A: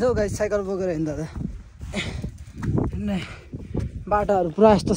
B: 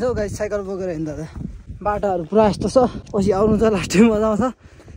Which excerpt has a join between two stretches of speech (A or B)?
B